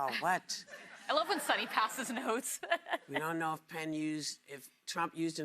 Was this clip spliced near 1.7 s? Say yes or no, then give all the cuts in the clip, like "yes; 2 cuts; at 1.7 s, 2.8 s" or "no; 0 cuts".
yes; 1 cut; at 1.7 s